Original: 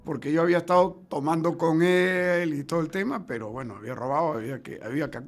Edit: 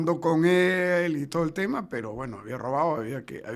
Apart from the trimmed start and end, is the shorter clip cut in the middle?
no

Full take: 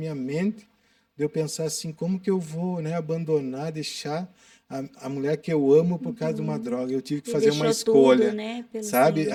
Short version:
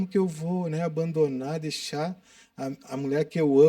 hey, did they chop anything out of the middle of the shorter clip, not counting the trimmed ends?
no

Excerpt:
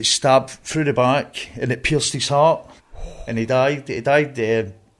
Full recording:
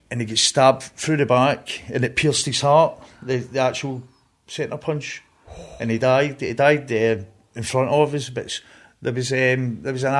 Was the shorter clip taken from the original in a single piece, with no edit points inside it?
no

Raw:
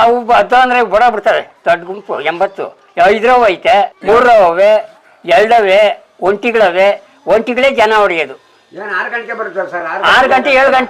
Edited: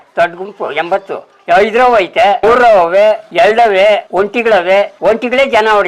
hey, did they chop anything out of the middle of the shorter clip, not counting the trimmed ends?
yes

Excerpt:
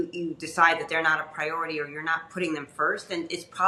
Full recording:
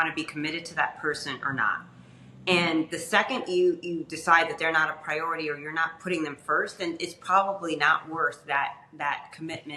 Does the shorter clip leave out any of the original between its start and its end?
no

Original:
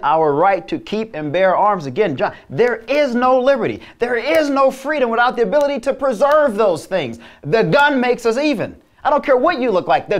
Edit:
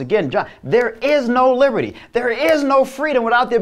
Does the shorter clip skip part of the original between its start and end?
no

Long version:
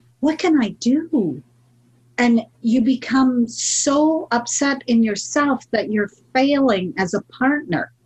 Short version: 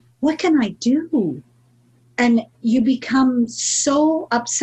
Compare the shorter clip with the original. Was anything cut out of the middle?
no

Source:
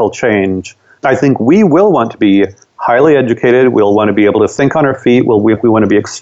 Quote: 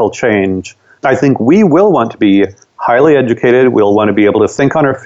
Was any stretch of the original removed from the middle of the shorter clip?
no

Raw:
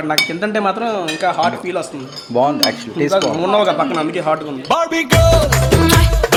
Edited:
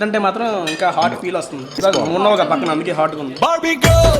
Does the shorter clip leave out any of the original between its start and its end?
yes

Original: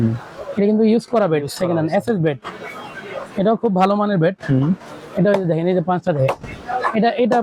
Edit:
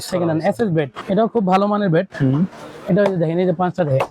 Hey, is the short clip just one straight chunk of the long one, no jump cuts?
no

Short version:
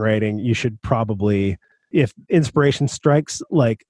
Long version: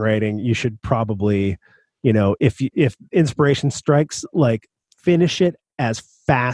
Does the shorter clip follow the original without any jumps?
no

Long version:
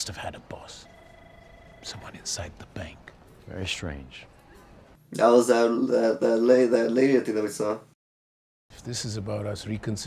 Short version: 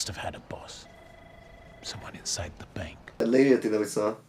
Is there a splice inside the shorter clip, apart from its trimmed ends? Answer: yes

